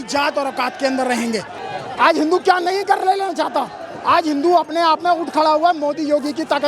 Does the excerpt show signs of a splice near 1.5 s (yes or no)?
yes